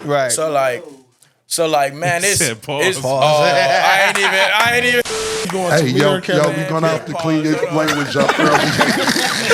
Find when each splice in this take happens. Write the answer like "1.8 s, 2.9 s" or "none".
none